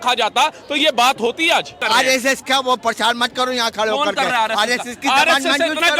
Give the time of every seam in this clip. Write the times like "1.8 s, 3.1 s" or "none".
1.8 s